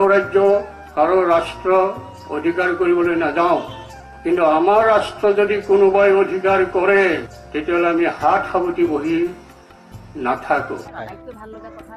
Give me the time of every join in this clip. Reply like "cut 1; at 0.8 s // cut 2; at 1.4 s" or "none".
cut 1; at 10.9 s